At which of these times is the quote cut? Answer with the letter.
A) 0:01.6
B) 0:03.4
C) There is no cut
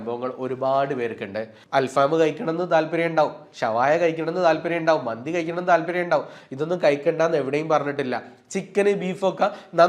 A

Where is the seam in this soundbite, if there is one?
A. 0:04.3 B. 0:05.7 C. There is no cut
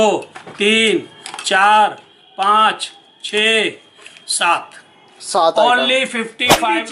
C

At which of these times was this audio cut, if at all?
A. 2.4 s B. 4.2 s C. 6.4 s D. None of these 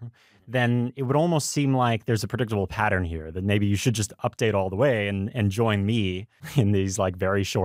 C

